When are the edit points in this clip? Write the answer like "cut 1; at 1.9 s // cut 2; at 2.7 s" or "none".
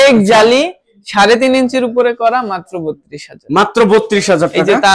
none